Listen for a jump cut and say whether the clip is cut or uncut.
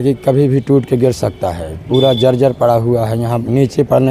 uncut